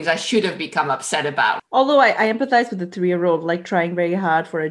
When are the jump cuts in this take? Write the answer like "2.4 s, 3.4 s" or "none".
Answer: 1.6 s